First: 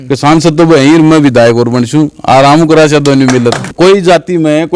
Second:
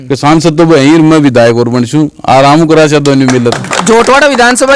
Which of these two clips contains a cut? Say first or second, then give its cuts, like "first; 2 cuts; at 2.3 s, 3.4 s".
first; 1 cut; at 3.6 s